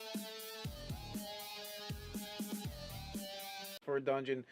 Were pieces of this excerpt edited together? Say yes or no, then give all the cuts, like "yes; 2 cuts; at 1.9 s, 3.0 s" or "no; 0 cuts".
no; 0 cuts